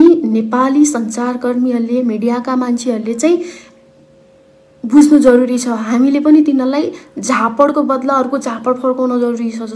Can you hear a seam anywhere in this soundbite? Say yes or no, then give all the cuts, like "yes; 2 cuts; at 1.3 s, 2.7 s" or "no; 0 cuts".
no; 0 cuts